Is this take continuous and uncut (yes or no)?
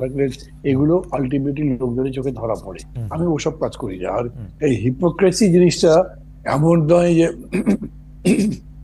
yes